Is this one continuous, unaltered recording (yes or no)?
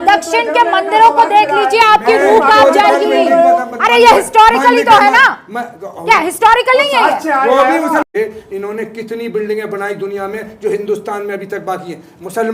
no